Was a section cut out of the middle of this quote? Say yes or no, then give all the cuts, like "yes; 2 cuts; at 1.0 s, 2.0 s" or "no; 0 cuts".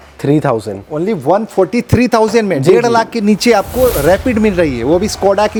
no; 0 cuts